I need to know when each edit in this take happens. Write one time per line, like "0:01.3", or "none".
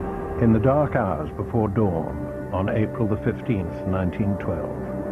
none

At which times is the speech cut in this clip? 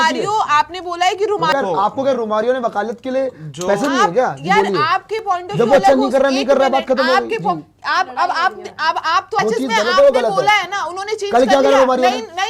0:01.5
0:09.4

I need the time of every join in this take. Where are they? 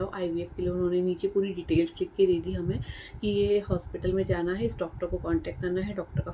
none

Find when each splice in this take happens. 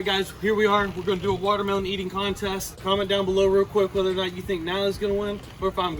0:02.8

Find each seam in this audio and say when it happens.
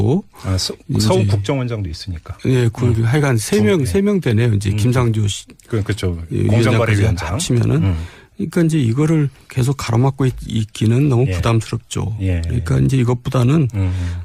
0:03.8

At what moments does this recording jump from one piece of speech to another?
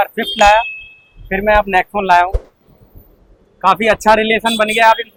none

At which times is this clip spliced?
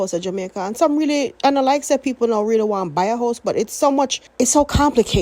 0:04.2

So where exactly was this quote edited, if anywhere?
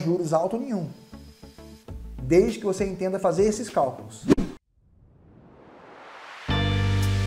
0:04.1

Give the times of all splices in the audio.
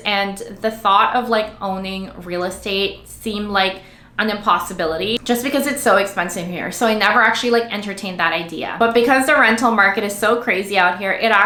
none

